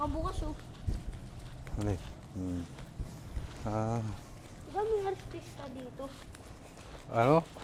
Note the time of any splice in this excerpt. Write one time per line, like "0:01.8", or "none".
none